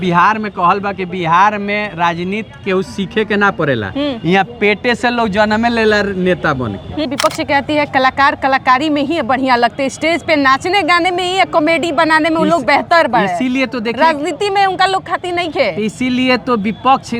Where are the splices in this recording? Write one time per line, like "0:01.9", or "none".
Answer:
0:06.9